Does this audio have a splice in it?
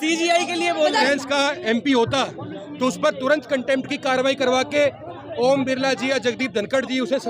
yes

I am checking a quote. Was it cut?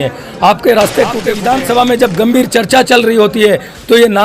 yes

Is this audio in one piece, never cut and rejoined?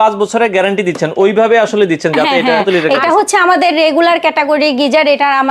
no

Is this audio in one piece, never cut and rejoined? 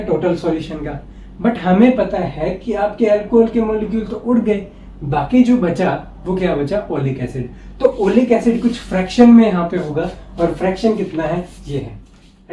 yes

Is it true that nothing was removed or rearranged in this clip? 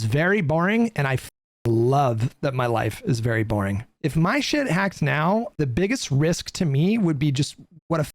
no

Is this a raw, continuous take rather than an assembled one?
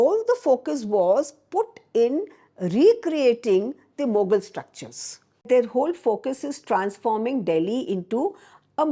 no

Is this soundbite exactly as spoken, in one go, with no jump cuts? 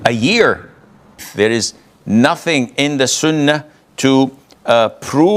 no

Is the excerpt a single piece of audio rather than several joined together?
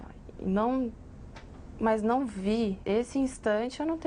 no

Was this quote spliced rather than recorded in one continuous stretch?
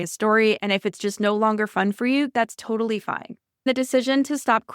yes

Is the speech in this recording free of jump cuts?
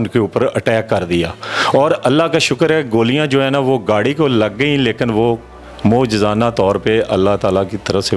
yes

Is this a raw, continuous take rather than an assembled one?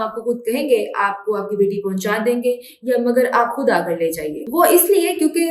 yes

